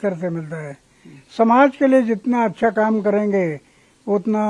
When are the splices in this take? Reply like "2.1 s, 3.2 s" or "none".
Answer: none